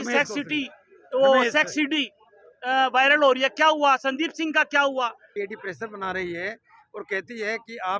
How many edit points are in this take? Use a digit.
1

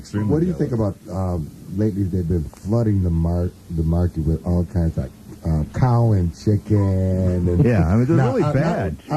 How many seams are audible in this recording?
1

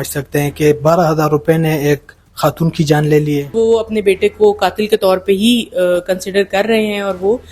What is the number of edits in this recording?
1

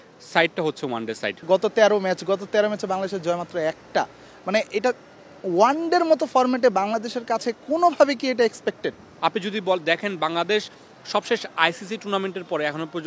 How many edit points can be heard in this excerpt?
2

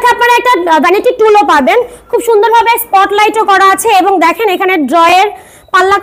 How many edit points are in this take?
0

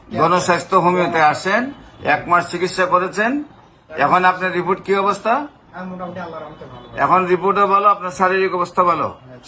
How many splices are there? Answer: 0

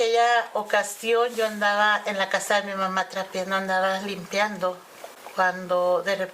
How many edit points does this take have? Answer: 0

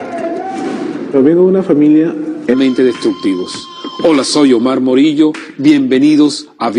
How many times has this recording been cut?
0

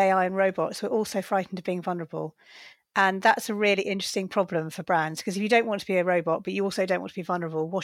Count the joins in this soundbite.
0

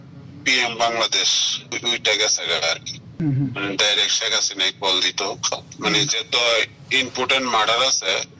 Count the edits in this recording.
3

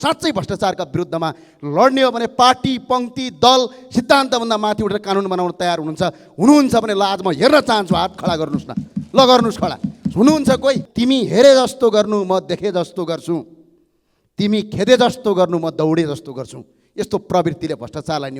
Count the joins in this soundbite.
1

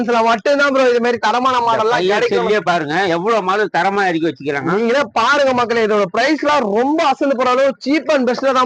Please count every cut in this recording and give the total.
0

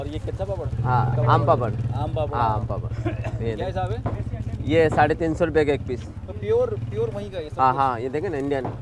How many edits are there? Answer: 0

